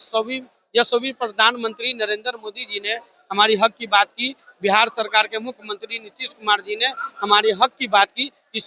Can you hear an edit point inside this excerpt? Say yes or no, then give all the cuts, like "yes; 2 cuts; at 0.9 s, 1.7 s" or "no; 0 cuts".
no; 0 cuts